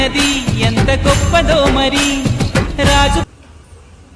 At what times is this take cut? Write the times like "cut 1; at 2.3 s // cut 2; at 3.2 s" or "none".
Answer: cut 1; at 3.3 s